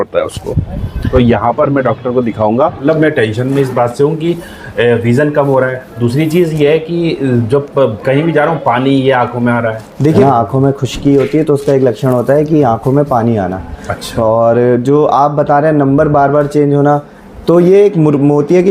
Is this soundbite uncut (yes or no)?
no